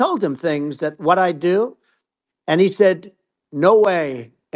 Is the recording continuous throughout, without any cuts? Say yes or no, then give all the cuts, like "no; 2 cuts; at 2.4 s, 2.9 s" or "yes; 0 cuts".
yes; 0 cuts